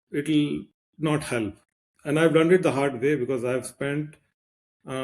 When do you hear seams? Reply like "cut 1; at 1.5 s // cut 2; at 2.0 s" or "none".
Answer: cut 1; at 1.6 s